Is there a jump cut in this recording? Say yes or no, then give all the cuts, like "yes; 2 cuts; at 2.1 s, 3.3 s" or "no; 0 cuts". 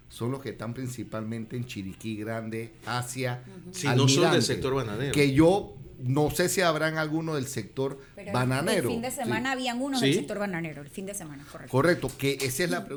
no; 0 cuts